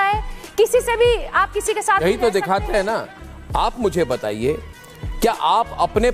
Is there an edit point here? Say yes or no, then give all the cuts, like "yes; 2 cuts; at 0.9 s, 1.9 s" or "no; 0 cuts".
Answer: yes; 1 cut; at 3.1 s